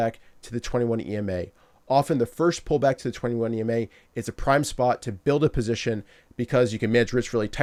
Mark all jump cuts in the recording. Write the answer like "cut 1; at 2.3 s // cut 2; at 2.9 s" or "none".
none